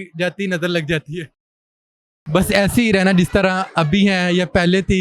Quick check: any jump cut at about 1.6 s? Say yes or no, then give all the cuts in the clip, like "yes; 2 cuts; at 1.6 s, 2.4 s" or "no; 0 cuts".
yes; 1 cut; at 1.6 s